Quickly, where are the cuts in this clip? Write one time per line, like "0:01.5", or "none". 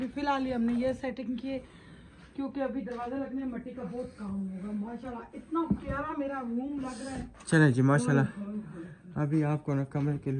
none